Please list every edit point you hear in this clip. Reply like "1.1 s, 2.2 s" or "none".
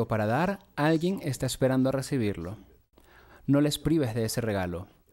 none